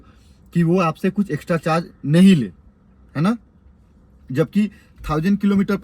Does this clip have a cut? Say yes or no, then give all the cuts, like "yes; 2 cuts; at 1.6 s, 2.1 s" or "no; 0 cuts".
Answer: no; 0 cuts